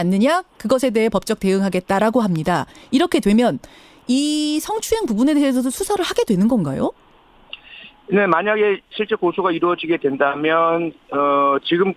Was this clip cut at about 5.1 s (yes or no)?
no